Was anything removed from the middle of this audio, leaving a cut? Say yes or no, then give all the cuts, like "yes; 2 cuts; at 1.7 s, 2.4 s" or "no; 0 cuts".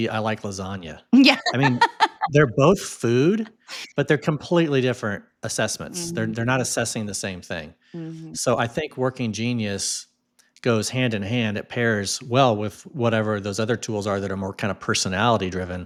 no; 0 cuts